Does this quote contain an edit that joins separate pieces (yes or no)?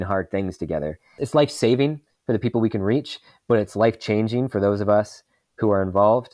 yes